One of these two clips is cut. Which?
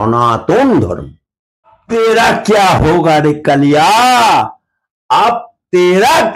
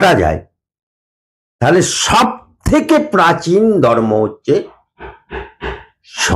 first; 1 cut; at 1.8 s

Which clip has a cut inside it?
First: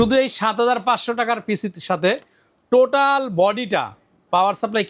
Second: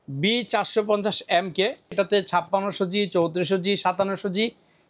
second; 1 cut; at 1.9 s

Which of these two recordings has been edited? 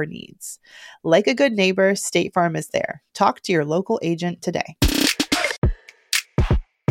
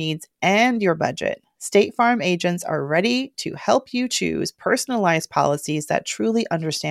first; 1 cut; at 5.6 s

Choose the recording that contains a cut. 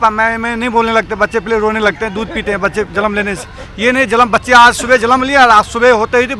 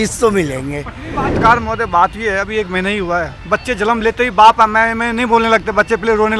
second; 1 cut; at 1.3 s

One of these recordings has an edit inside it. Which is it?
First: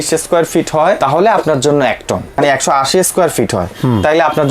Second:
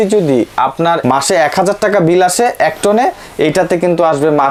first; 2 cuts; at 1.0 s, 2.4 s

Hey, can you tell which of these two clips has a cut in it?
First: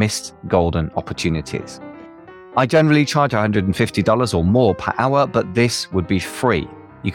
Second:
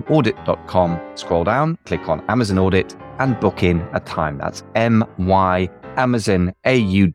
second; 1 cut; at 5.8 s

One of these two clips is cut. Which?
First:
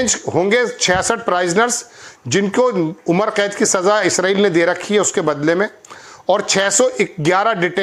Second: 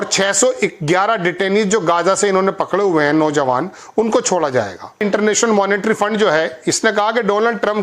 second; 1 cut; at 5.0 s

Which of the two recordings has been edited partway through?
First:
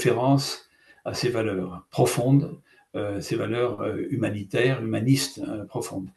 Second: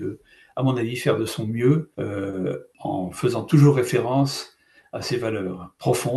second; 1 cut; at 2.5 s

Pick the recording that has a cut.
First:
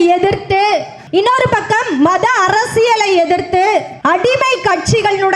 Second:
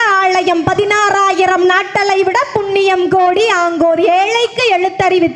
first; 2 cuts; at 1.0 s, 3.9 s

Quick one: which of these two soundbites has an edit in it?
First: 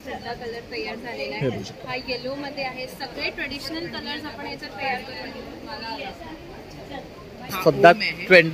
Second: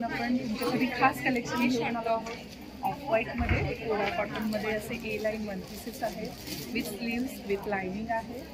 first; 1 cut; at 7.5 s

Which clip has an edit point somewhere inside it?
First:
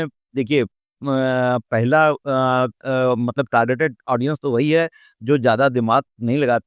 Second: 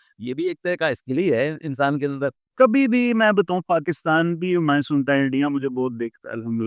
second; 1 cut; at 2.4 s

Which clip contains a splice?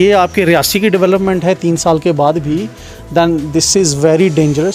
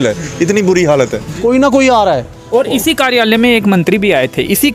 second; 1 cut; at 1.2 s

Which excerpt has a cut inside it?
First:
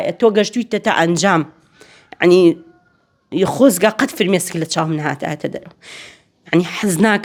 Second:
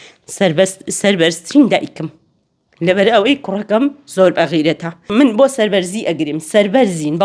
second; 1 cut; at 4.9 s

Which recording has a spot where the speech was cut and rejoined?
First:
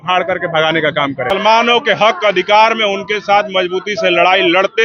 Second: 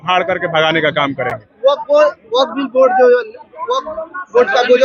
first; 1 cut; at 1.3 s

